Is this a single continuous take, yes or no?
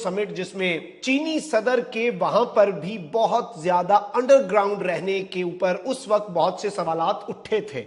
no